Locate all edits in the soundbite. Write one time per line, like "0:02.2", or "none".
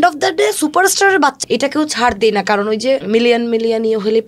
0:01.4
0:03.0